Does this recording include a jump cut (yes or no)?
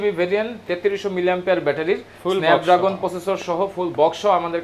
no